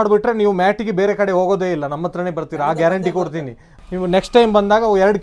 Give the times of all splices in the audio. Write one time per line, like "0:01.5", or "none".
0:03.7